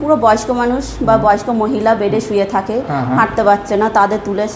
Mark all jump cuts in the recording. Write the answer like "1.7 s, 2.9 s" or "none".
none

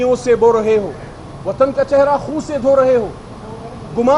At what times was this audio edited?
none

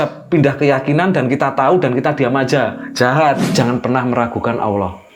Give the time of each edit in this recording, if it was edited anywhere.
3.4 s

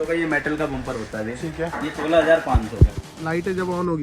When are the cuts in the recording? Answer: 3.0 s

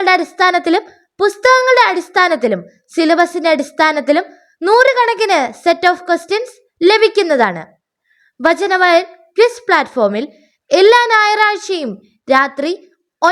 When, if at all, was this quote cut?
none

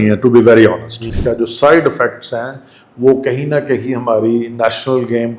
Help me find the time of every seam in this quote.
1.1 s

